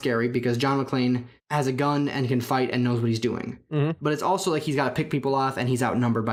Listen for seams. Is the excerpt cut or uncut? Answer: uncut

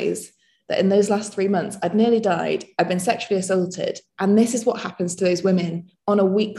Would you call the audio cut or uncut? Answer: uncut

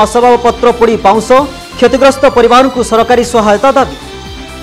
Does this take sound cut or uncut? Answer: uncut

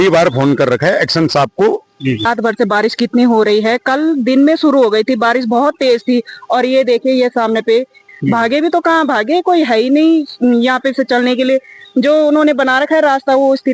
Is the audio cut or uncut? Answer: cut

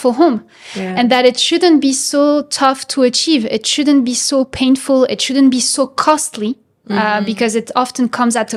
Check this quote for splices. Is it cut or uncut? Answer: uncut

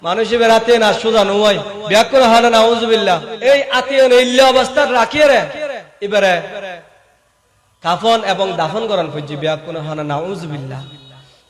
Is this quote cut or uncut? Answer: cut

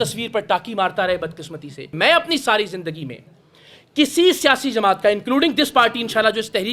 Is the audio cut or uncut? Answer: cut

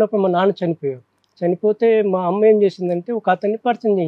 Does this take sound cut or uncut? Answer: uncut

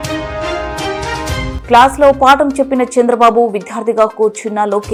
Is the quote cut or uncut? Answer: uncut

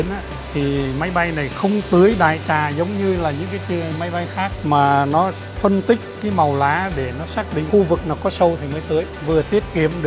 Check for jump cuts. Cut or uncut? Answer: uncut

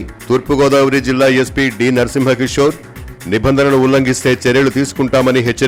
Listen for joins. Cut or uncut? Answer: uncut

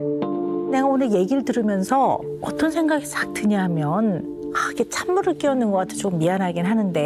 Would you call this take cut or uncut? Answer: uncut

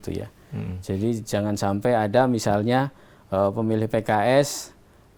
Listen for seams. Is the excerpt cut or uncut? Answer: uncut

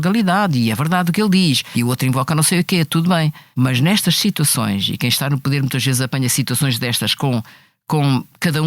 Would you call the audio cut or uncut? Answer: cut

